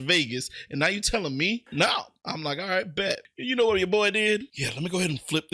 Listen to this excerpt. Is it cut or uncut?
cut